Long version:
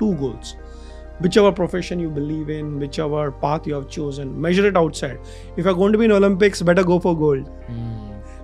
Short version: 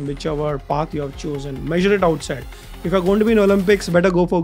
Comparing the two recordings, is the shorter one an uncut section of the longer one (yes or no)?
yes